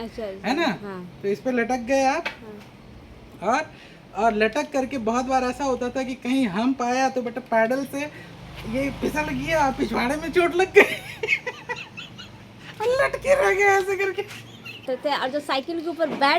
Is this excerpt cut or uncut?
cut